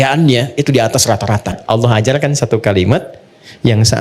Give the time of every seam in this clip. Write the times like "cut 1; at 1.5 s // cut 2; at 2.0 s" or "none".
cut 1; at 1.6 s